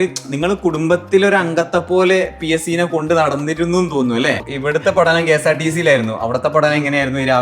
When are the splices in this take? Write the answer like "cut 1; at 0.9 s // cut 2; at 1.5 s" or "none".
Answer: cut 1; at 4.5 s